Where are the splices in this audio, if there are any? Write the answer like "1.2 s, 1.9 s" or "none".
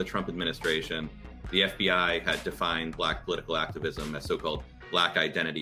none